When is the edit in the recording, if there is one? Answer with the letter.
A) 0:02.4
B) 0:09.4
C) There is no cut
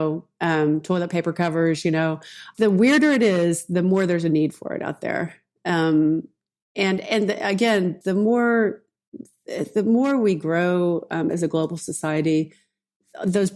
A